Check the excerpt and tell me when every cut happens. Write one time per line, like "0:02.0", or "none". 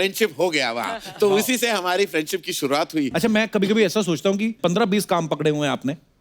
0:03.1